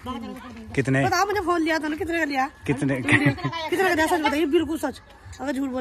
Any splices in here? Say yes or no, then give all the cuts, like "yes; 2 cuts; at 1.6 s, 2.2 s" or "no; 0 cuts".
no; 0 cuts